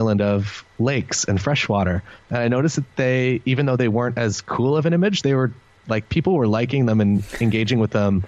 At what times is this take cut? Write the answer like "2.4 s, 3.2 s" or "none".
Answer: none